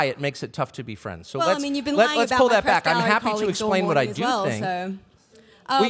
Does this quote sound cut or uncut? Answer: uncut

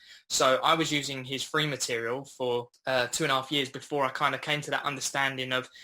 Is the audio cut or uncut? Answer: cut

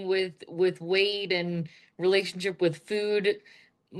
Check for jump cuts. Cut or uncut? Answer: uncut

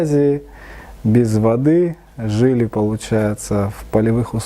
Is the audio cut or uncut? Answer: uncut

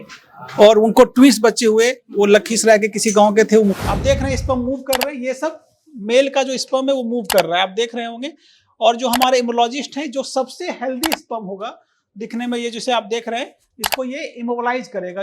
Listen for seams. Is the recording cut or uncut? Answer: cut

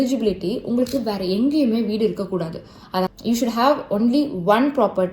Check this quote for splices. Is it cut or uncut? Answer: cut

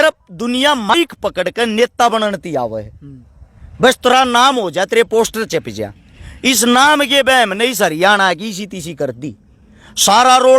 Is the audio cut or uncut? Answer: cut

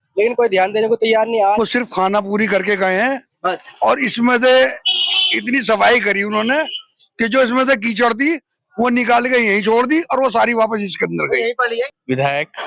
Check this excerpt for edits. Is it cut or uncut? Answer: cut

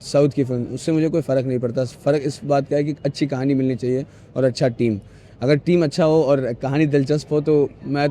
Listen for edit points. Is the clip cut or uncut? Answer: uncut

